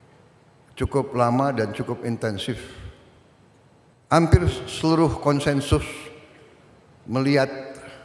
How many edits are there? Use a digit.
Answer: 1